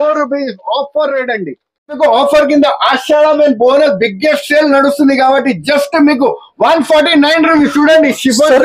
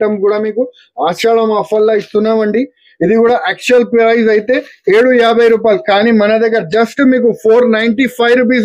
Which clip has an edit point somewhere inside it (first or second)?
first